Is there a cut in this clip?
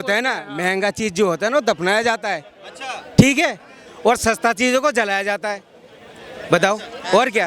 no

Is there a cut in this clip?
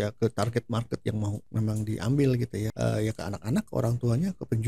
yes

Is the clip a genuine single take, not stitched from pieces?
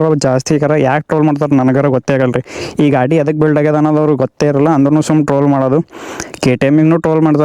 yes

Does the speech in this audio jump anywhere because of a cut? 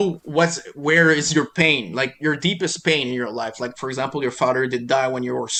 no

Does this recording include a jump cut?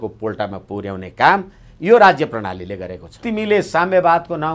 yes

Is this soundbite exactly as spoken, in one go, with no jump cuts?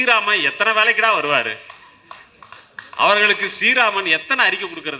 yes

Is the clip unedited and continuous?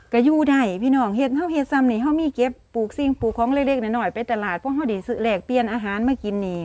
yes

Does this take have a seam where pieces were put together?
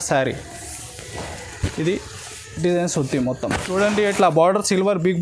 yes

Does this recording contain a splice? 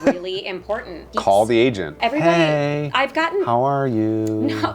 yes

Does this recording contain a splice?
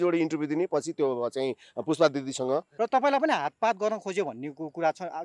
yes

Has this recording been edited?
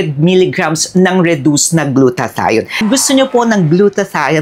yes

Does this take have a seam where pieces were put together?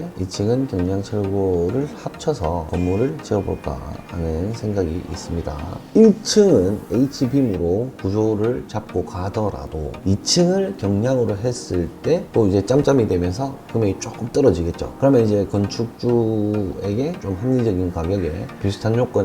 yes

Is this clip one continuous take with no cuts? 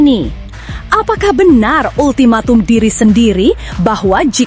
yes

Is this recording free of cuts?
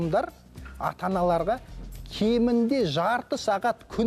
yes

